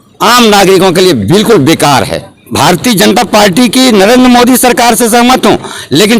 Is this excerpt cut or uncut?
cut